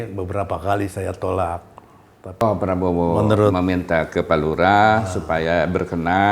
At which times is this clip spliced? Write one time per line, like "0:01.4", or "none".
0:02.4